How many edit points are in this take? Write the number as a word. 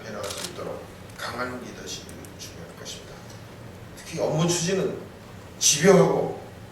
one